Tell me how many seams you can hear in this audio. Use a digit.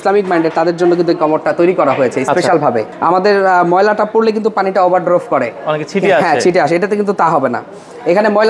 1